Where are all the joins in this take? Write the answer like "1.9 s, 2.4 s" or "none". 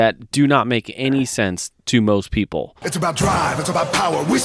2.8 s